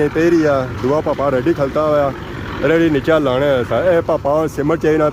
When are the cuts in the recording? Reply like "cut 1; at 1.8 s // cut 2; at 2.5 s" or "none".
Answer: none